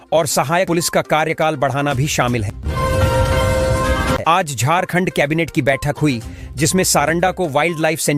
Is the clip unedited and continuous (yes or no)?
no